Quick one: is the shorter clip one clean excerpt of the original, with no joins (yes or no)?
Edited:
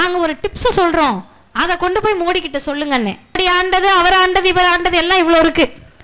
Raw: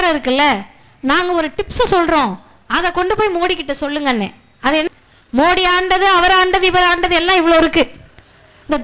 no